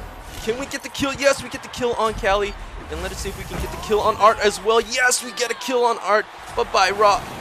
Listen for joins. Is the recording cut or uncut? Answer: uncut